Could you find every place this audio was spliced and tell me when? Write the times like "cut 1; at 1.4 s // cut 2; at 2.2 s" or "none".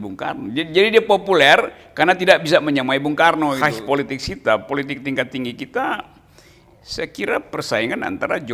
cut 1; at 3.6 s